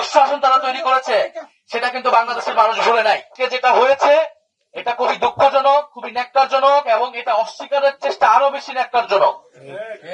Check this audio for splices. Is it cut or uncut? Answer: cut